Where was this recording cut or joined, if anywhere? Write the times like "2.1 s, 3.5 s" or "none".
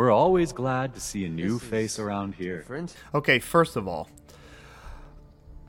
2.9 s